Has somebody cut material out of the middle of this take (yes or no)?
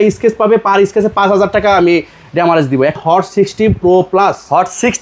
yes